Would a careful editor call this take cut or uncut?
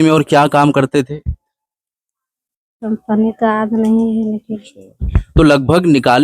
uncut